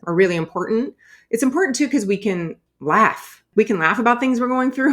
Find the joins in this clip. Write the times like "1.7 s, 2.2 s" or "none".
3.5 s